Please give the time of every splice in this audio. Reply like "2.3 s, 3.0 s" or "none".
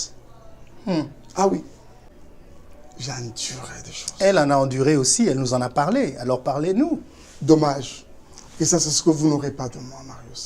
1.9 s